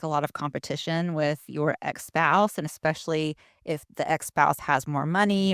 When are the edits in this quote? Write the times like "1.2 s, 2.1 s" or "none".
none

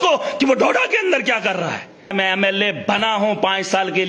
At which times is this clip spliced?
2.1 s

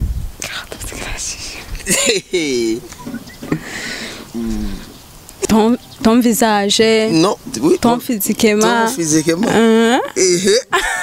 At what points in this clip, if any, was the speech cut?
5.4 s

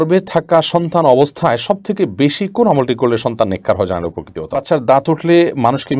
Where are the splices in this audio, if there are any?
4.6 s

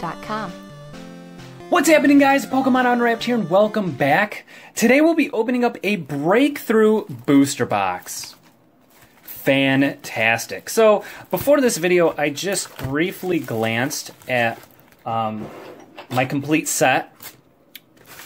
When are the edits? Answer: none

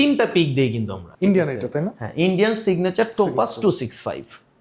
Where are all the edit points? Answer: 1.0 s

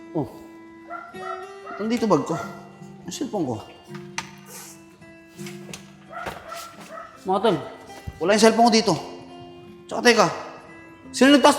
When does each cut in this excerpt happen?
none

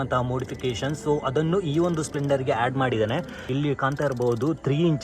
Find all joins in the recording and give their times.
3.4 s

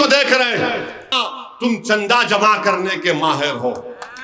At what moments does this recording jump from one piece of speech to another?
1.1 s

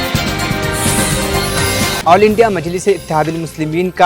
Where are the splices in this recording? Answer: 2.0 s

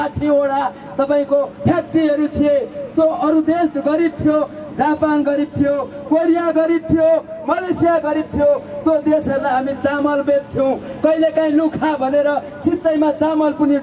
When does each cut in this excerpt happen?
none

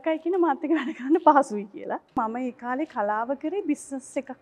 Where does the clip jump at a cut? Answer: 2.2 s

